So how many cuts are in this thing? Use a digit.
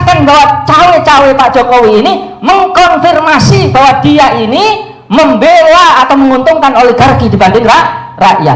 0